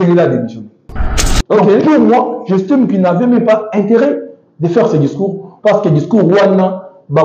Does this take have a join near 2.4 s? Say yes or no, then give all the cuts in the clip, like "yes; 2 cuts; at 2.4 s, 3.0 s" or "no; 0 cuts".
no; 1 cut; at 1.1 s